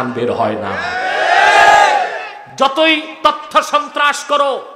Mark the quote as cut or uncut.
uncut